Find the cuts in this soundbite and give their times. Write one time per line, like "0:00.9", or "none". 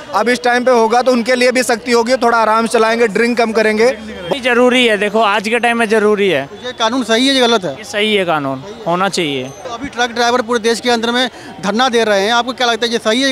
0:04.2
0:09.6